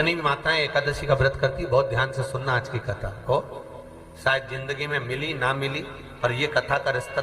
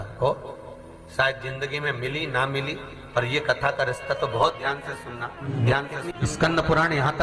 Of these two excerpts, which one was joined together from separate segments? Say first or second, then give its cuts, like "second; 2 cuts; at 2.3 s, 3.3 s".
second; 2 cuts; at 5.4 s, 6.1 s